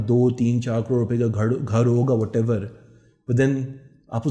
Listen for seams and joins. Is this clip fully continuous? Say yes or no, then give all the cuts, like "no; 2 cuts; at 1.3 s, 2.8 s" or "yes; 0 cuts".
yes; 0 cuts